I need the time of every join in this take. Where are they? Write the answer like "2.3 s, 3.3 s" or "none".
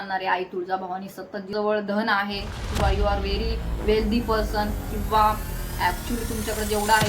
1.5 s